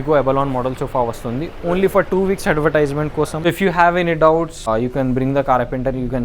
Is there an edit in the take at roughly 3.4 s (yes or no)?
yes